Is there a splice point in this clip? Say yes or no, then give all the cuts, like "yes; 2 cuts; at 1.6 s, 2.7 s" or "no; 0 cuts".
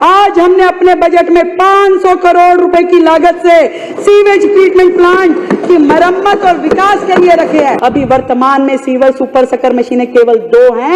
yes; 1 cut; at 7.8 s